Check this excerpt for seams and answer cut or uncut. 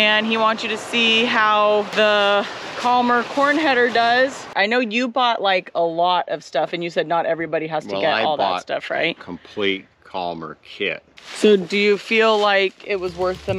cut